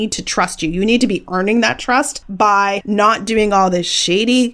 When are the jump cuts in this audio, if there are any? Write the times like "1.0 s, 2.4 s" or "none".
2.6 s

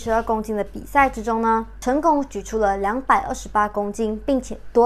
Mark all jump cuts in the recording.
1.7 s

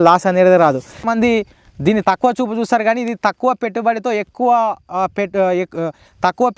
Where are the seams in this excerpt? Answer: 1.1 s

